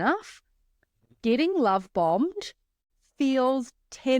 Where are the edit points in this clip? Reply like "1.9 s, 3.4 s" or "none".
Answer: 2.9 s